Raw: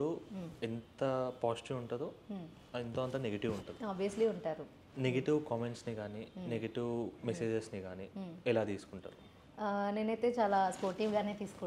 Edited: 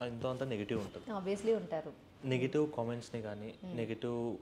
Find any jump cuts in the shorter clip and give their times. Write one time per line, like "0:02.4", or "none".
none